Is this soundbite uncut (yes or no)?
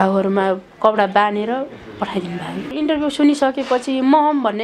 no